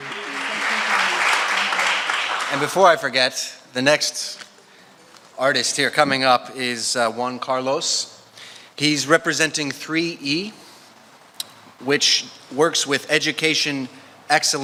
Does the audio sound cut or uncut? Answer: uncut